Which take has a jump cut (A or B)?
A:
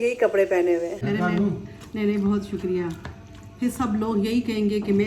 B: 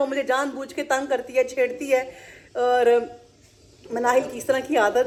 A